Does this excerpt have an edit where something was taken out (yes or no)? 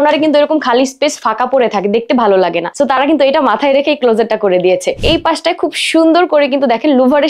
yes